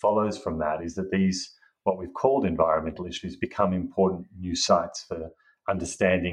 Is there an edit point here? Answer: no; 0 cuts

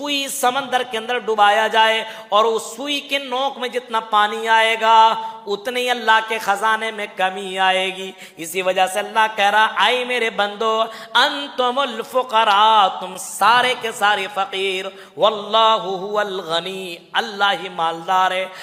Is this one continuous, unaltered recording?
yes; 0 cuts

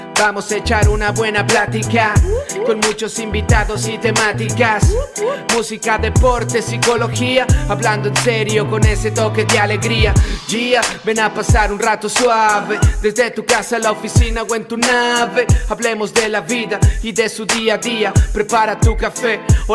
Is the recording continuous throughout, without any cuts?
yes; 0 cuts

